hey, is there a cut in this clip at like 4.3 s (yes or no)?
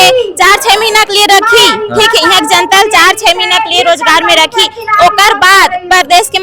no